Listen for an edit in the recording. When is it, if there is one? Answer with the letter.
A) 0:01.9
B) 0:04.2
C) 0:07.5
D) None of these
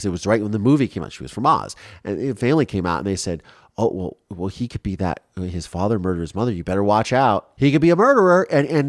C